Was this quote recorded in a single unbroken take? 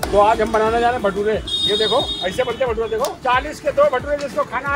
no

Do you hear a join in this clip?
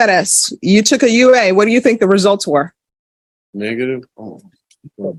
no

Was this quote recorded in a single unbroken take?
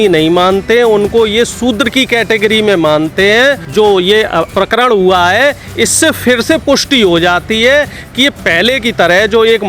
no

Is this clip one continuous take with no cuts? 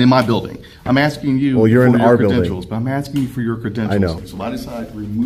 no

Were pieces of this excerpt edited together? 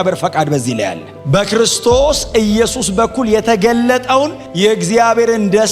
yes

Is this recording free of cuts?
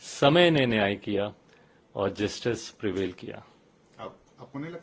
yes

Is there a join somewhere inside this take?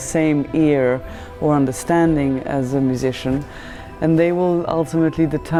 no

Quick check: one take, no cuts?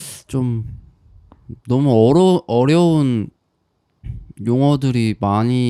yes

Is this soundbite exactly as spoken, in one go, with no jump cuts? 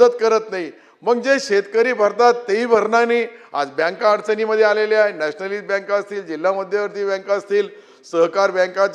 yes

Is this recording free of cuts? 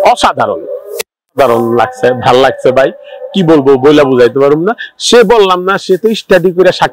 yes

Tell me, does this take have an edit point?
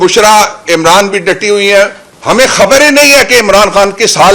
yes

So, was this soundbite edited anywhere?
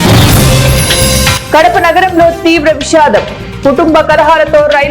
no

